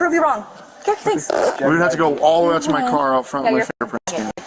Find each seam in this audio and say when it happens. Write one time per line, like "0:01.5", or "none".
none